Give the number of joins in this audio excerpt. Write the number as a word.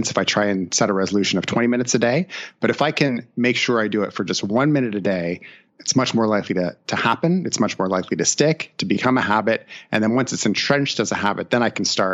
one